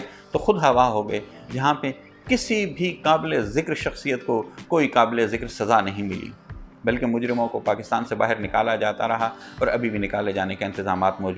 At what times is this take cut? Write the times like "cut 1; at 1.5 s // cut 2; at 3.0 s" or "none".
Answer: none